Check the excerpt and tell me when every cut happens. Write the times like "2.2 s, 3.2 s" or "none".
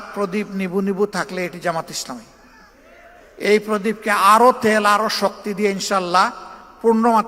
3.2 s